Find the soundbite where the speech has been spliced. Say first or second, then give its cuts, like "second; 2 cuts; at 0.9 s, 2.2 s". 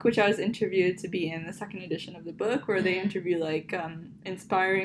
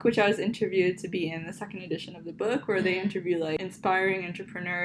second; 1 cut; at 3.6 s